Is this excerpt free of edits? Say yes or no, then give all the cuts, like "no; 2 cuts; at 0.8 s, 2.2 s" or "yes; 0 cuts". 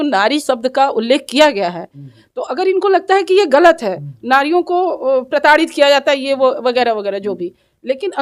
yes; 0 cuts